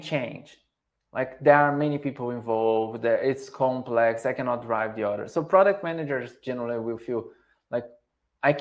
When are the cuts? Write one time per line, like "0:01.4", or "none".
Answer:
none

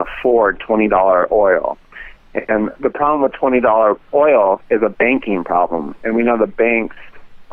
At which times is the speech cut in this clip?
none

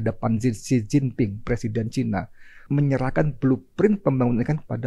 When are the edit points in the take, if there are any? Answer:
0:02.6

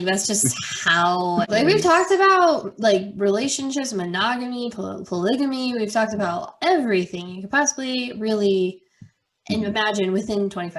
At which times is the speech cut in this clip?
0:01.5

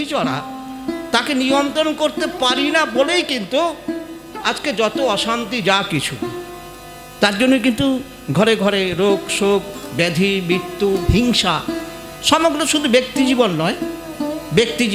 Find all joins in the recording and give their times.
none

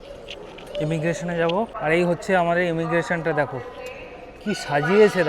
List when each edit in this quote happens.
0:01.7

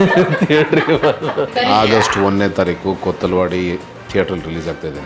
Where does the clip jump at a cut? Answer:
0:01.5

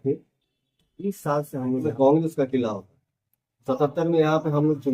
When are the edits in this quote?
0:01.8

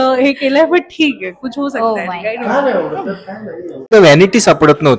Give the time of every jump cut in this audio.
0:03.9

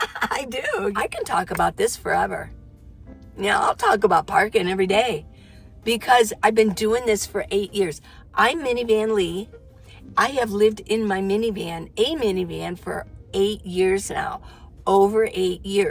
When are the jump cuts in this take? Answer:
0:00.9

